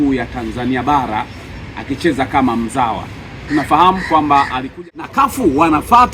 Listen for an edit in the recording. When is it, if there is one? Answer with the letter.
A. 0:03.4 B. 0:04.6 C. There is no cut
B